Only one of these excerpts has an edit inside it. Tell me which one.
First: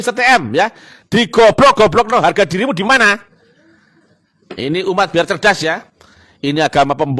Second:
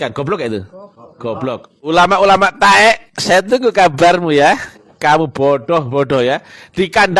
second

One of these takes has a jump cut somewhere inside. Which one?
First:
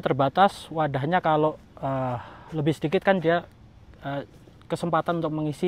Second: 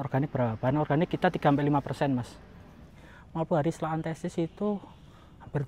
second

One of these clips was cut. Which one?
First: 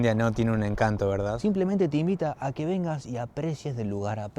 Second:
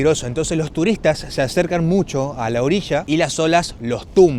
first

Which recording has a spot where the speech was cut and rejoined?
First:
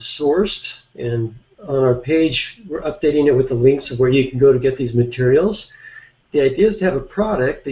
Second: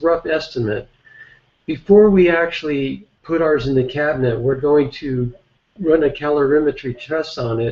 second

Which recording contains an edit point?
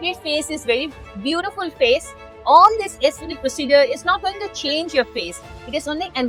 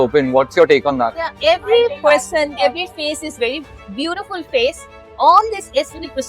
second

